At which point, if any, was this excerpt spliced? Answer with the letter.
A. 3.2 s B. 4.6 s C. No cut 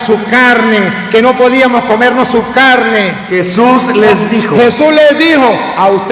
A